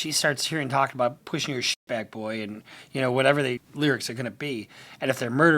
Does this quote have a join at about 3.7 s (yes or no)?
yes